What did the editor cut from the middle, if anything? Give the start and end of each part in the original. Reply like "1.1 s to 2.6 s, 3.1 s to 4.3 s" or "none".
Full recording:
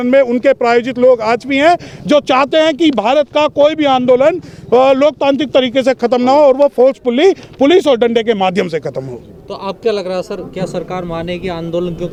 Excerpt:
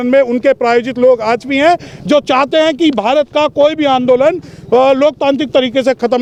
none

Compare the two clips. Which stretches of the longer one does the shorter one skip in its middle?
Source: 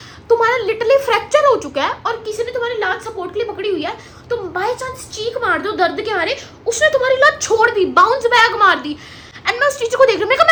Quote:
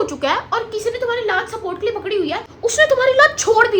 4.0 s to 6.5 s

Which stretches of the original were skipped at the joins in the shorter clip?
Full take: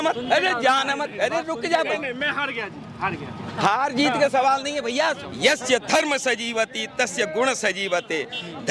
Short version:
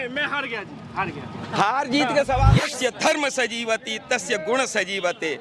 4.7 s to 5.6 s

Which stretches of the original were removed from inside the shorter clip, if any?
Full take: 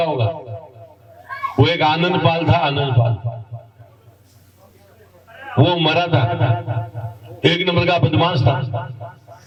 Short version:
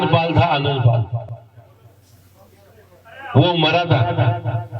3.4 s to 3.5 s

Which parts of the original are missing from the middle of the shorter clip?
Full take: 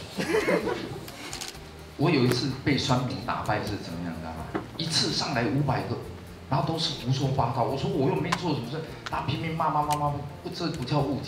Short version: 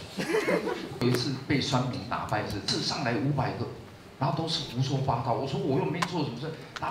1.0 s to 2.2 s, 3.8 s to 5.0 s

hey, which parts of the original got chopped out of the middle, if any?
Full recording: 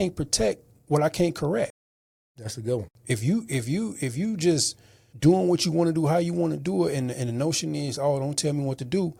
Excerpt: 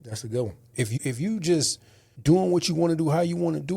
3.2 s to 3.9 s

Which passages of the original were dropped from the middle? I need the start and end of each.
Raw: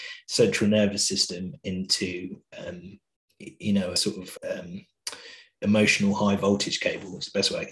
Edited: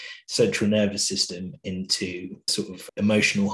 2.5 s to 5.1 s

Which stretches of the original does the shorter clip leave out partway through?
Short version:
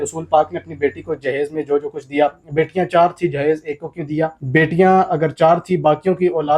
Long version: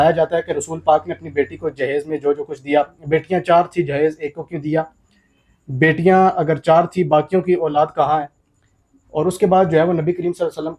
4.9 s to 5.7 s

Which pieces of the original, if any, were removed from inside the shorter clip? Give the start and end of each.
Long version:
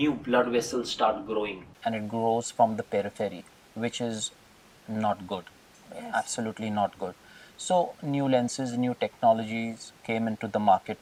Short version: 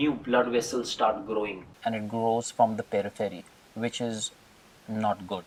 none

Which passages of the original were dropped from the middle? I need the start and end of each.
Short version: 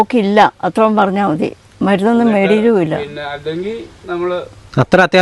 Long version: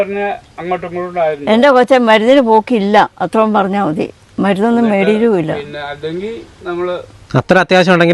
none

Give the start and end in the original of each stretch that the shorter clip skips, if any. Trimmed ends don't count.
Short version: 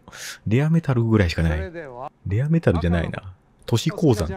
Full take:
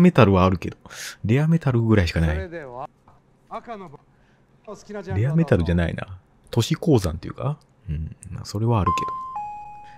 3.0 s to 5.1 s

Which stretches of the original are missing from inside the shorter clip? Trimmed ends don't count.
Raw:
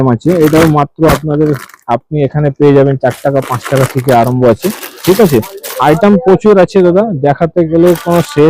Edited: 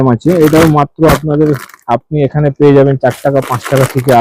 none

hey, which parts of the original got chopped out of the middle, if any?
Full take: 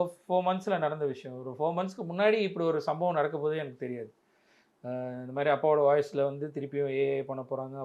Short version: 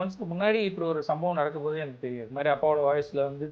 4.1 s to 5.3 s

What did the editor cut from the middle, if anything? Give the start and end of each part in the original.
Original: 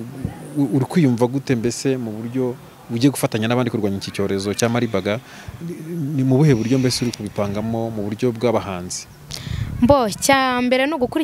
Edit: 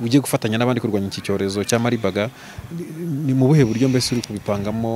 none

